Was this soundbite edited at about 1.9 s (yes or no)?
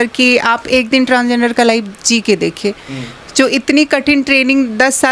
no